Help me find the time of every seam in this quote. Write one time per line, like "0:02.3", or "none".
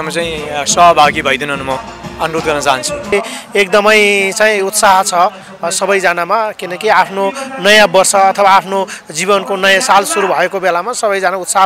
0:03.1

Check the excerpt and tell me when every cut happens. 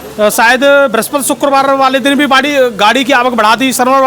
none

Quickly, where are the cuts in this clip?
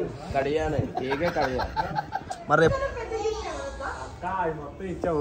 0:02.7

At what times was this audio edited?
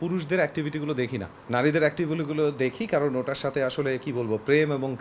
none

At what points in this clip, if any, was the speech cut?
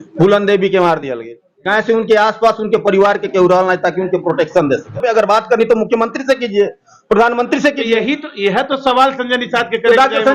0:05.0

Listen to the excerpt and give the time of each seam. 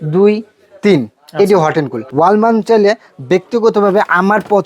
0:02.0

